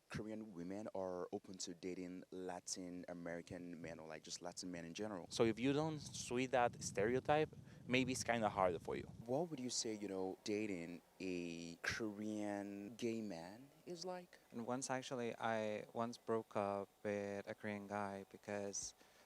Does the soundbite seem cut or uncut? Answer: cut